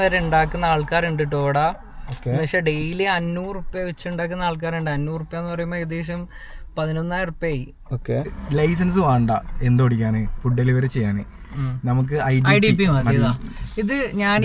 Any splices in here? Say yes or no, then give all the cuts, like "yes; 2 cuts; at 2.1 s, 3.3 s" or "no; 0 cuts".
yes; 1 cut; at 8.3 s